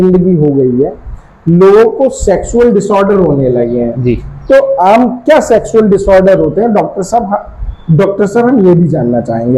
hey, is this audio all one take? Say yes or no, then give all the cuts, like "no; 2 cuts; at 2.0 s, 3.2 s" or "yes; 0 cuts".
yes; 0 cuts